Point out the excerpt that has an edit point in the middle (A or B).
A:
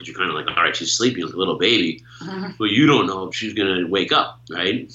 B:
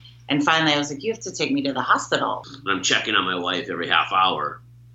B